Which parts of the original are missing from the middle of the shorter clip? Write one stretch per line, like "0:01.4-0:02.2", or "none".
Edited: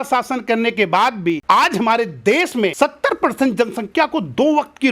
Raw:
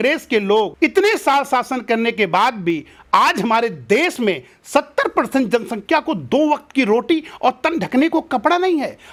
0:02.8-0:03.0
0:04.4-0:04.7